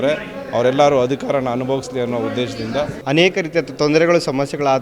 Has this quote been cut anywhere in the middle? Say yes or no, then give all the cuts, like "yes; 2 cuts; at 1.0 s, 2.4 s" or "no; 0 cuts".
yes; 1 cut; at 3.0 s